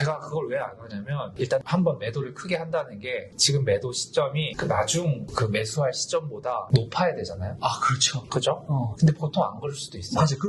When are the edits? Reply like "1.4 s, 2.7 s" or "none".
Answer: 7.5 s, 8.9 s